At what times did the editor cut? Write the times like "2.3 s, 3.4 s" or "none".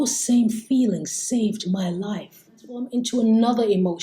2.9 s